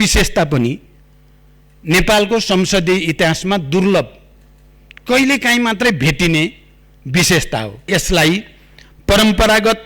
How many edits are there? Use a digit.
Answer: 1